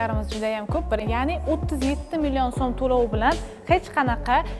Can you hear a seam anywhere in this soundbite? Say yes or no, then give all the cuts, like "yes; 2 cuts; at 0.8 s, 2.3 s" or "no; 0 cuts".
yes; 1 cut; at 1.0 s